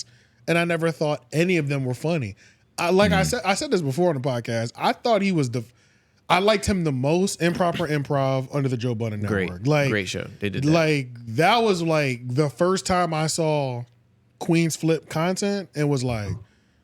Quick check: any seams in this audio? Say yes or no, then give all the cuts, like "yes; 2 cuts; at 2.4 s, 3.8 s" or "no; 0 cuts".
no; 0 cuts